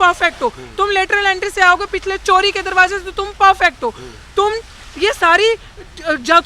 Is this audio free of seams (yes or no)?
yes